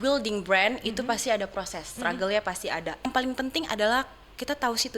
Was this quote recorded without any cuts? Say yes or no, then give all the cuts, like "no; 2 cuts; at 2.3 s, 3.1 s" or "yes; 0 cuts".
no; 1 cut; at 3.0 s